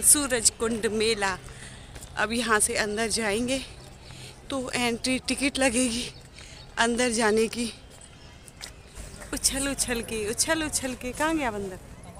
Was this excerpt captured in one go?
no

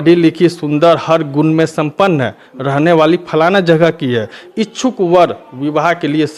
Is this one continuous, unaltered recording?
yes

